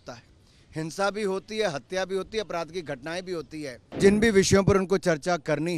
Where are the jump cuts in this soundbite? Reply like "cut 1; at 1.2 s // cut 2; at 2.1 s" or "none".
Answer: cut 1; at 4.0 s